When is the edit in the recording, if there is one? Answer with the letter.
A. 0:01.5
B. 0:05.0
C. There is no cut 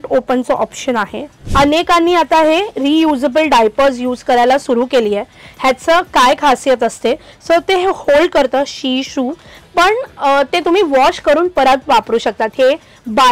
A